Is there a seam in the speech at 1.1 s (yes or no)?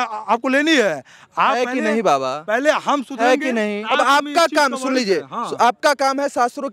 no